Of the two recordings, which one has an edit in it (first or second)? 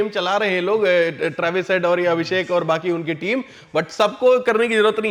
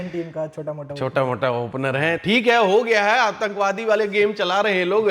second